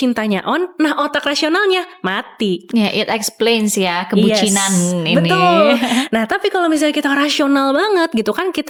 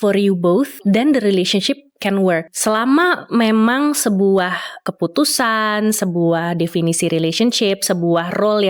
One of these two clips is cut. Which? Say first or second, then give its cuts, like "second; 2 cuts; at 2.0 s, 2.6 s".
second; 3 cuts; at 0.8 s, 2.5 s, 4.8 s